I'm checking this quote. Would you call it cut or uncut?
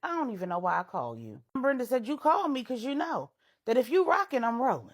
cut